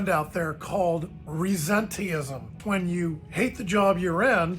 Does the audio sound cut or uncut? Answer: cut